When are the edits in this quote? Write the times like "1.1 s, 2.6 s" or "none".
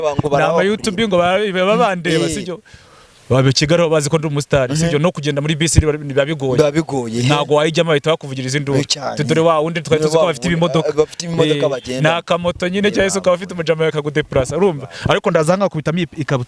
none